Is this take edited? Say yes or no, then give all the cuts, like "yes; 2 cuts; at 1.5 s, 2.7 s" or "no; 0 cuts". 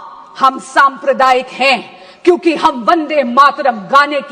no; 0 cuts